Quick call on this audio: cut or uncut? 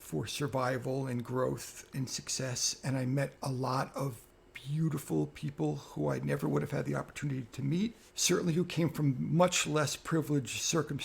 cut